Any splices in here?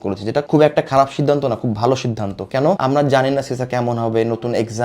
no; 0 cuts

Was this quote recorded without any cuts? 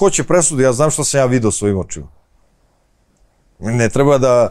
yes; 0 cuts

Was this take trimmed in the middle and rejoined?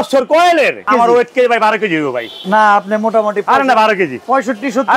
yes; 2 cuts; at 0.8 s, 2.3 s

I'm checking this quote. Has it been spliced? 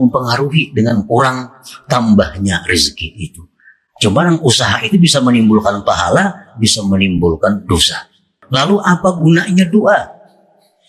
yes; 1 cut; at 8.4 s

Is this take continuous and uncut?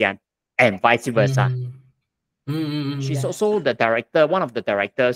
no; 1 cut; at 3.1 s

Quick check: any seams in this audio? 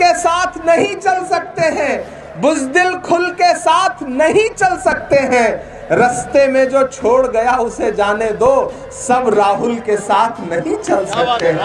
no; 0 cuts

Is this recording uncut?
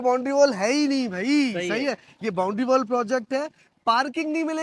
yes; 0 cuts

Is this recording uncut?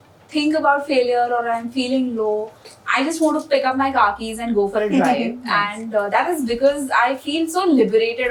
yes; 0 cuts

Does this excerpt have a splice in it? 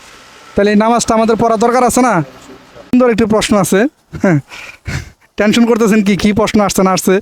yes; 1 cut; at 2.9 s

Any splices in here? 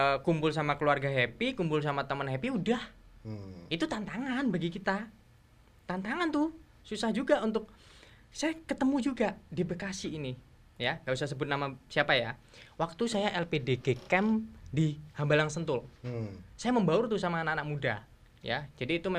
no; 0 cuts

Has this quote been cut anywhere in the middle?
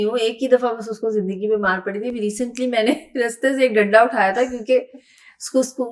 no; 0 cuts

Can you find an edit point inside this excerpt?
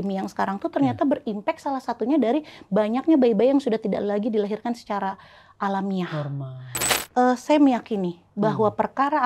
yes; 1 cut; at 6.8 s

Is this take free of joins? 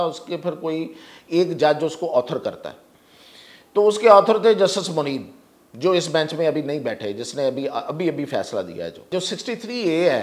no; 1 cut; at 9.1 s

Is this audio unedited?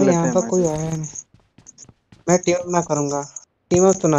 yes; 0 cuts

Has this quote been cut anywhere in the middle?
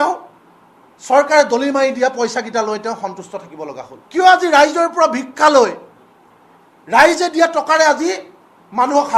yes; 1 cut; at 3.9 s

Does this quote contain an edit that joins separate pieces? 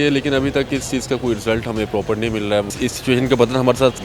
yes; 1 cut; at 2.7 s

